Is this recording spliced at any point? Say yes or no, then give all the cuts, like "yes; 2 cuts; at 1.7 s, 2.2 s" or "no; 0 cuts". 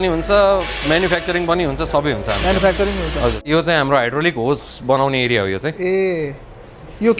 yes; 1 cut; at 3.4 s